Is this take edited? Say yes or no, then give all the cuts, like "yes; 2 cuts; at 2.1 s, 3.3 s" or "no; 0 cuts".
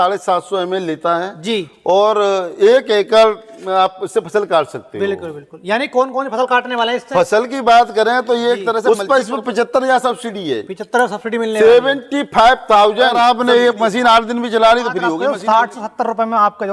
yes; 3 cuts; at 8.8 s, 13.1 s, 15.1 s